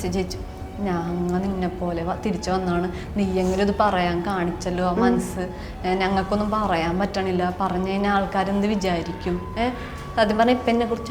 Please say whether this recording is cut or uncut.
uncut